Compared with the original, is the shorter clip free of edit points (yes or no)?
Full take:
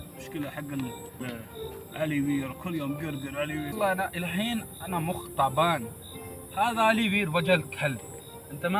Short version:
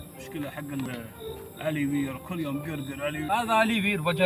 no